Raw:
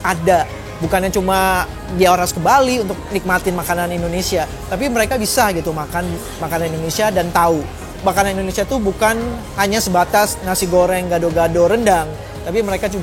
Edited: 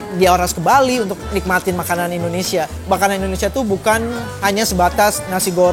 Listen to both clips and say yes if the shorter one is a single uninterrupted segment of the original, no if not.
no